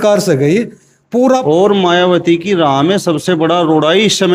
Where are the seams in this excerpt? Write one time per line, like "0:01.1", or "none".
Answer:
0:01.4